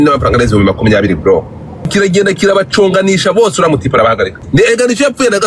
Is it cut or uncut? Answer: cut